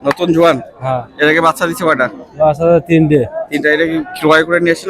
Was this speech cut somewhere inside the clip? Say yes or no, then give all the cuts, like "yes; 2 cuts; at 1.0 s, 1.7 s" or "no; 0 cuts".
no; 0 cuts